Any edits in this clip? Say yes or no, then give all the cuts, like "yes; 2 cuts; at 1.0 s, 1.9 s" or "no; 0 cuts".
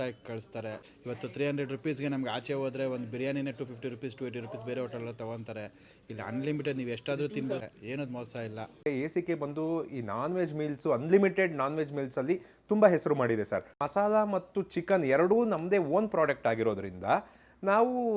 yes; 4 cuts; at 0.9 s, 7.6 s, 8.9 s, 13.8 s